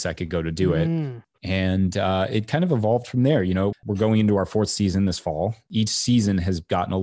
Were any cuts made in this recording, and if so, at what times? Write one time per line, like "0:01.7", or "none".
0:01.3
0:03.7
0:05.6